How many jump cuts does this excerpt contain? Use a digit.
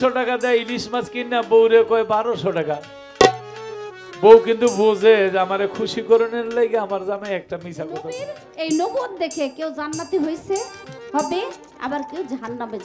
1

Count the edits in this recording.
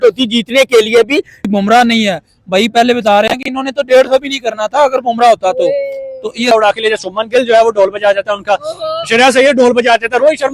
2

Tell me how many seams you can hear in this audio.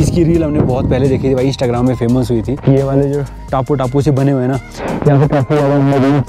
0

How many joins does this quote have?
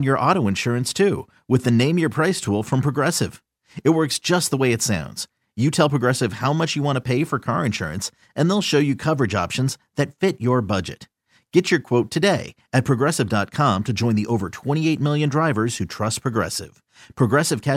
0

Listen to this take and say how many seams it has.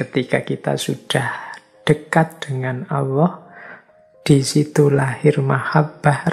0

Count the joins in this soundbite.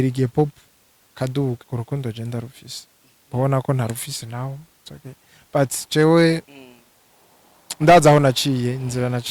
1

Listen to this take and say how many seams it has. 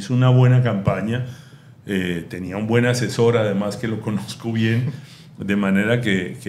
0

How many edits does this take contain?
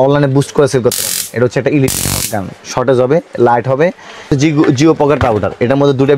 1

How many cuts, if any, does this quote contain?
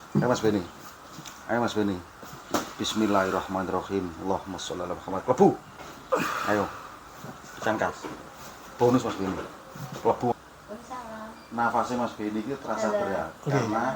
1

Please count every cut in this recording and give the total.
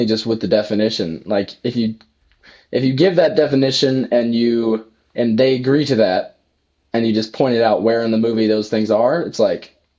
0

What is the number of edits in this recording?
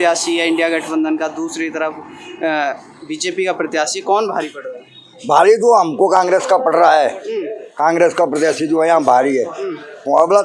0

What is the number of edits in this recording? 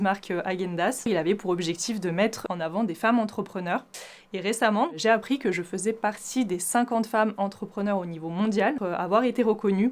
2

